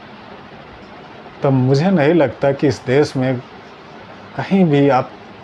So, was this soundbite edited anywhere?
no; 0 cuts

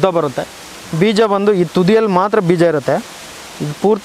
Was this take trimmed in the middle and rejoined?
no; 0 cuts

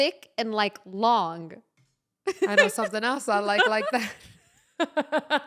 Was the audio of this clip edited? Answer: no; 0 cuts

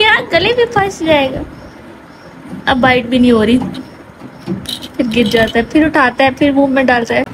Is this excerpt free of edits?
yes; 0 cuts

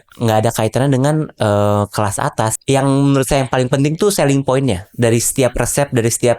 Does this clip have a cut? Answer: yes; 1 cut; at 2.5 s

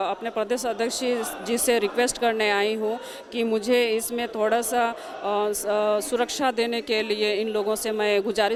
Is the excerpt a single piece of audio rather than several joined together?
yes; 0 cuts

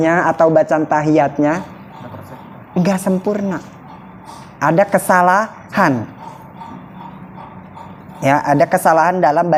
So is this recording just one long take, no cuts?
yes; 0 cuts

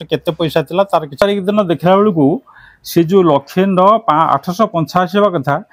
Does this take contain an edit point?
yes; 1 cut; at 1.1 s

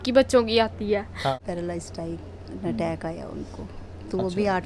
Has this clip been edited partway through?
yes; 1 cut; at 1.4 s

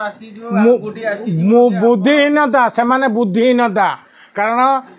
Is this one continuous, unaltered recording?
yes; 0 cuts

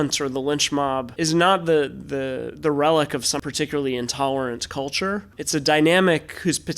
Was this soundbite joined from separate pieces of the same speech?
yes; 3 cuts; at 1.1 s, 3.4 s, 5.4 s

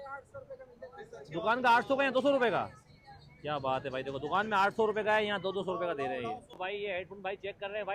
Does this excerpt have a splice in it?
no; 0 cuts

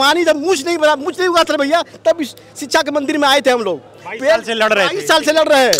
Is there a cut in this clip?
no; 0 cuts

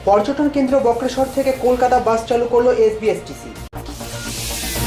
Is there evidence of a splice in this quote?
yes; 1 cut; at 3.7 s

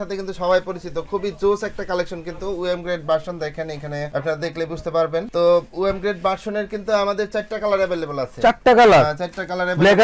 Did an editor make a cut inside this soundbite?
no; 0 cuts

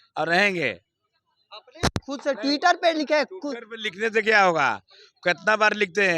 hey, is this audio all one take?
yes; 0 cuts

